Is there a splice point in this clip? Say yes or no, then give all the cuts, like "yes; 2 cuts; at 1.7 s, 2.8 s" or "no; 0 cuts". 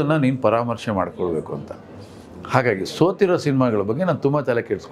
no; 0 cuts